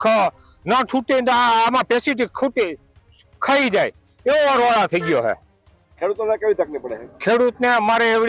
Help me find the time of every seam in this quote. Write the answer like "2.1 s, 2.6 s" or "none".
none

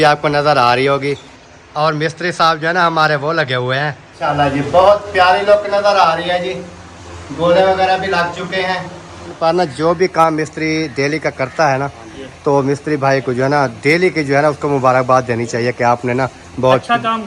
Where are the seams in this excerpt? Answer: 4.2 s, 9.4 s

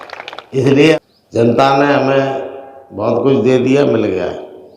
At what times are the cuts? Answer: 0.9 s

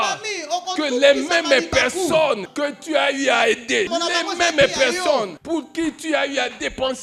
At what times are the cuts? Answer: 2.5 s, 3.9 s, 5.4 s

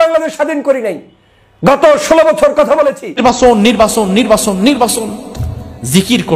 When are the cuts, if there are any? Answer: 3.1 s

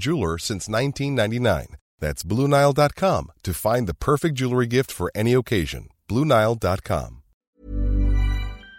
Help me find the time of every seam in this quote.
7.6 s

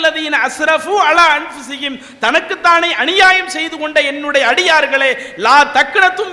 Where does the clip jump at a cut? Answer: none

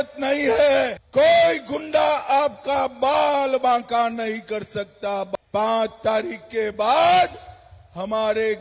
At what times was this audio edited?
1.0 s, 5.3 s

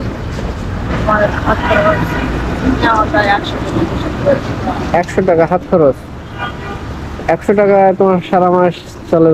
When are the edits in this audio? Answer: none

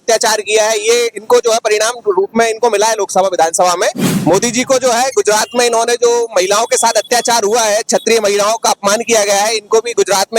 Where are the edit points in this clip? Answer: 4.1 s

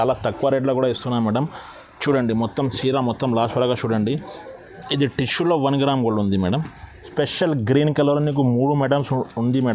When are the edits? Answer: 7.1 s

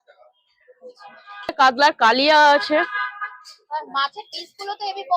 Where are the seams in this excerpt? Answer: 1.5 s

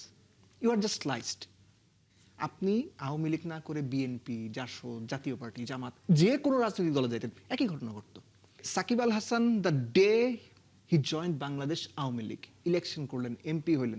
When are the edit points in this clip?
8.6 s

